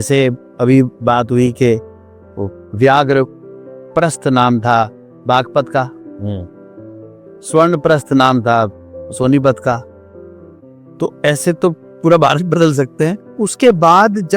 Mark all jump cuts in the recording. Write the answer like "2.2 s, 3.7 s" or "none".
13.3 s